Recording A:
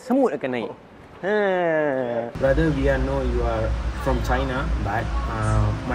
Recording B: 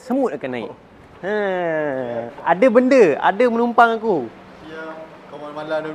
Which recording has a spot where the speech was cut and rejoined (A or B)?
A